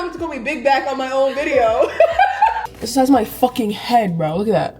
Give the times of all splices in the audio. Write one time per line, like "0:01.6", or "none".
0:02.6